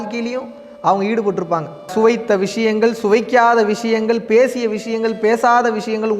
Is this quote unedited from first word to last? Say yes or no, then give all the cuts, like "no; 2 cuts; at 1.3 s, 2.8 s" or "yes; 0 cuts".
no; 1 cut; at 1.9 s